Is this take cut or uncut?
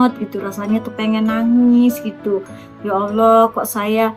uncut